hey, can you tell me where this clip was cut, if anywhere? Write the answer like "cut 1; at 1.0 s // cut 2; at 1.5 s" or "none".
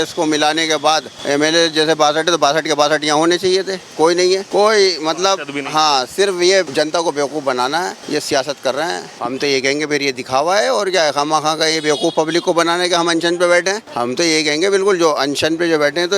cut 1; at 1.1 s // cut 2; at 4.5 s // cut 3; at 6.7 s // cut 4; at 8.0 s // cut 5; at 9.1 s // cut 6; at 13.9 s